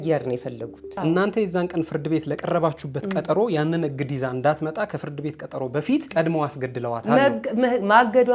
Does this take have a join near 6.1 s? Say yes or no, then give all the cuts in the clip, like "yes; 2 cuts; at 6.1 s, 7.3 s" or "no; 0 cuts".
yes; 2 cuts; at 0.9 s, 6.1 s